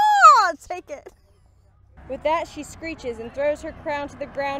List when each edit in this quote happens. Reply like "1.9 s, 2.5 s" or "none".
1.9 s